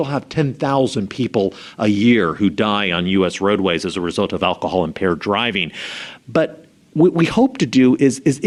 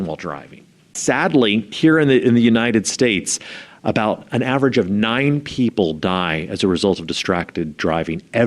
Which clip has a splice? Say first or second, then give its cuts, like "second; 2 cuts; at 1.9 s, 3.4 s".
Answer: second; 2 cuts; at 0.9 s, 1.7 s